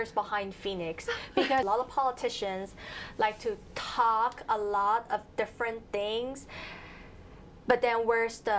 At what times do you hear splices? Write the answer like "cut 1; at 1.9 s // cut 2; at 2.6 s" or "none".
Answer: cut 1; at 1.6 s